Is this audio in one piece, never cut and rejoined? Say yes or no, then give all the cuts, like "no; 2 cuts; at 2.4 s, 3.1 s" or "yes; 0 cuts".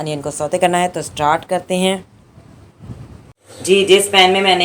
yes; 0 cuts